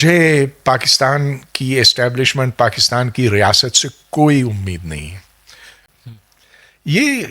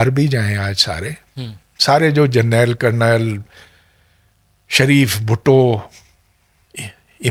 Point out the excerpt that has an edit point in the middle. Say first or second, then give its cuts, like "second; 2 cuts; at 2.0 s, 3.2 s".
first; 1 cut; at 5.9 s